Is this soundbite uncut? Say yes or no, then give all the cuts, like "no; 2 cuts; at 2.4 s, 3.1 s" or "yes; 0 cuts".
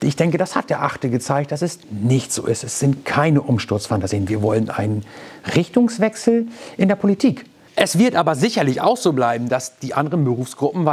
no; 1 cut; at 7.5 s